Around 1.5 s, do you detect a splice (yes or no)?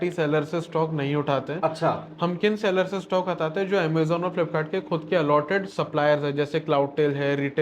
no